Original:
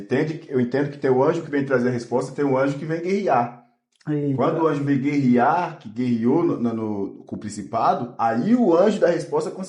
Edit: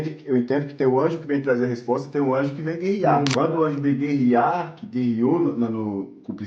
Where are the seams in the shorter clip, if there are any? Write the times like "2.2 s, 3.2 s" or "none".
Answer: 3.2 s